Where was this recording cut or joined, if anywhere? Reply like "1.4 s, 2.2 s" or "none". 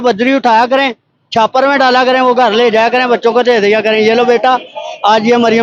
none